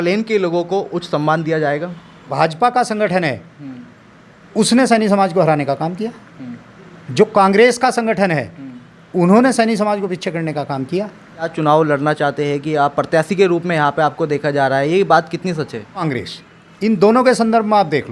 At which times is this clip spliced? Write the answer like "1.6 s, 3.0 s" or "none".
2.3 s, 11.5 s, 16.1 s